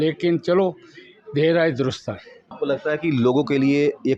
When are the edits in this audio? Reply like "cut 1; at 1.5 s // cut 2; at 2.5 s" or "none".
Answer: cut 1; at 2.5 s